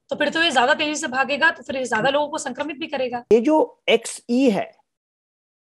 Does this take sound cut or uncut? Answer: cut